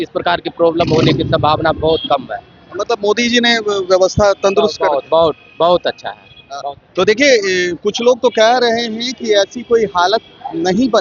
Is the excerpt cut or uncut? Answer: uncut